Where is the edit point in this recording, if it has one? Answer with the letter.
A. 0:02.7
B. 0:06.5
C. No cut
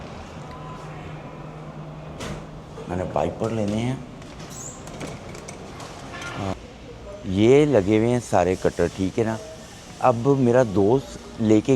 B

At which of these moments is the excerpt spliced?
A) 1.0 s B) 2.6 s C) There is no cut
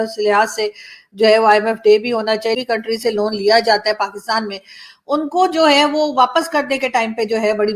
B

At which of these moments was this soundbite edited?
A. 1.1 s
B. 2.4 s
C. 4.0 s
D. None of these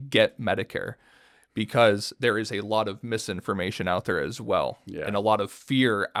D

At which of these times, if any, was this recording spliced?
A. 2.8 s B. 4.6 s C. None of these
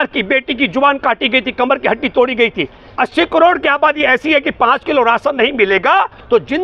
A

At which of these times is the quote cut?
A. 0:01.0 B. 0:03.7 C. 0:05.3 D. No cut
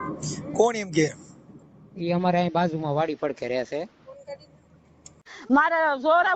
C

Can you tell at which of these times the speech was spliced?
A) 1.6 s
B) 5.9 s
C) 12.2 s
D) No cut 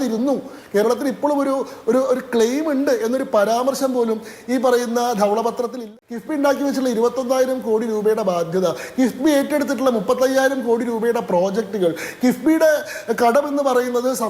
B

